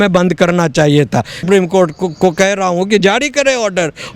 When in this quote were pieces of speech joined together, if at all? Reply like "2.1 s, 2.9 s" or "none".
1.5 s